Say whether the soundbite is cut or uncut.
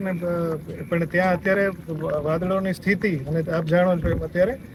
uncut